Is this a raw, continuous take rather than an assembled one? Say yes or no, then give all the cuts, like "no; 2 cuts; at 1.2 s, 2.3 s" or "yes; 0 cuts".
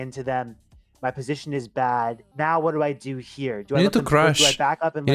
no; 1 cut; at 2.2 s